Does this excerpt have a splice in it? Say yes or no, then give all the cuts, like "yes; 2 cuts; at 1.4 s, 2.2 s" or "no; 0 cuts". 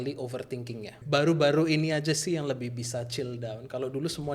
yes; 1 cut; at 1.0 s